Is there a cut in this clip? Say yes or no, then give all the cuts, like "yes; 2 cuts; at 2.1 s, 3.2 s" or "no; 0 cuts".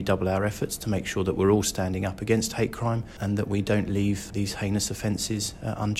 yes; 2 cuts; at 3.2 s, 4.3 s